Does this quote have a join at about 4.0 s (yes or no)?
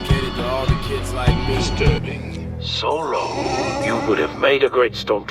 no